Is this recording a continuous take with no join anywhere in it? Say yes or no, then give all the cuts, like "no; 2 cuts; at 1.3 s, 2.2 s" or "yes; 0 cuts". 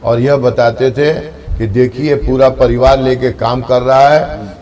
yes; 0 cuts